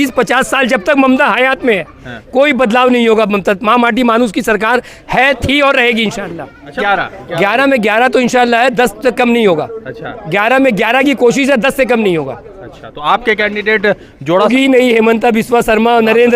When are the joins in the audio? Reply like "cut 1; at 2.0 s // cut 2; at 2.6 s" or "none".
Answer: cut 1; at 6.8 s // cut 2; at 14.5 s